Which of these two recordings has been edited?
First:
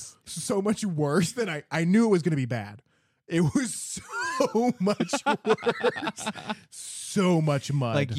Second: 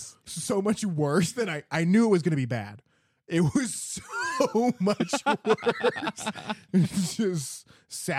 second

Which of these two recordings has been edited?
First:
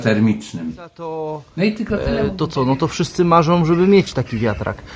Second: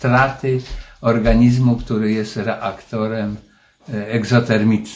first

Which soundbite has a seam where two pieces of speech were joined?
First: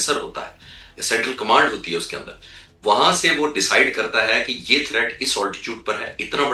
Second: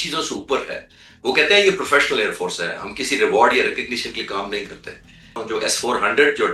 second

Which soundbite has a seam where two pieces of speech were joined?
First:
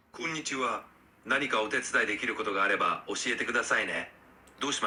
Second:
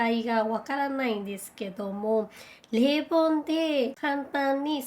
second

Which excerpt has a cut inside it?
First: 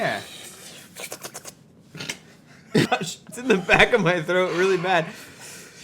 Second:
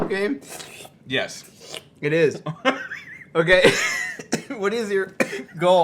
first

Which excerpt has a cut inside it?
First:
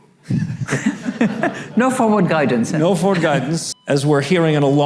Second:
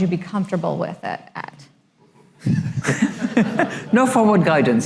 first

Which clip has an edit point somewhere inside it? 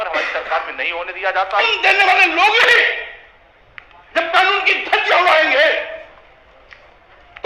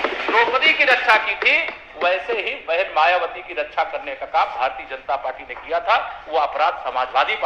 first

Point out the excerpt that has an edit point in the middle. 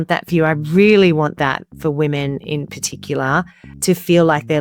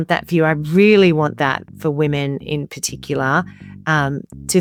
first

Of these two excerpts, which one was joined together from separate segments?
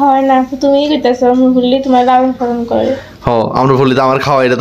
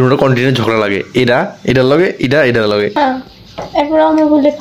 second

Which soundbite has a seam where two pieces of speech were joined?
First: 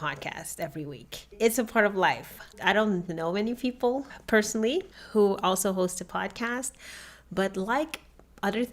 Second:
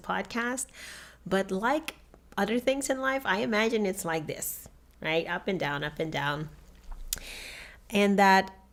first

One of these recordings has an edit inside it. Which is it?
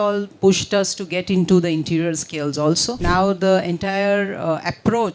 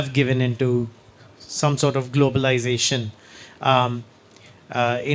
first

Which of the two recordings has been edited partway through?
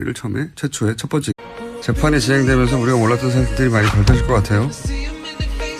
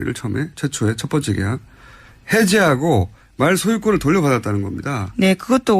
second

